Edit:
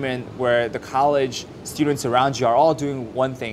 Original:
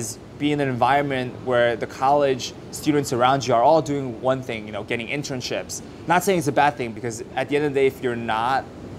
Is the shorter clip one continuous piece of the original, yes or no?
yes